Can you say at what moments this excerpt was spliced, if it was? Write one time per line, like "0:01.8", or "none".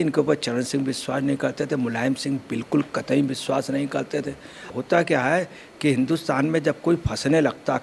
0:04.7

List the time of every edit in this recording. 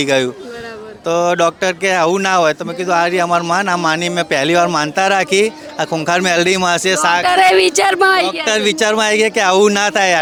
none

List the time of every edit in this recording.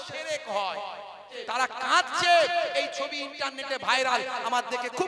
0:01.3

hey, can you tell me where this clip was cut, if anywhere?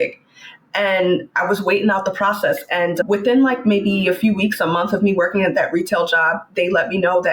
0:03.0

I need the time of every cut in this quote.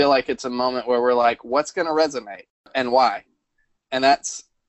0:02.7

